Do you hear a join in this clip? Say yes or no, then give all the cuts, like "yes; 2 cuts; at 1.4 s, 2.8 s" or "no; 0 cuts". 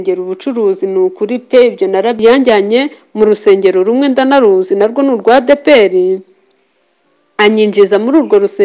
yes; 1 cut; at 2.2 s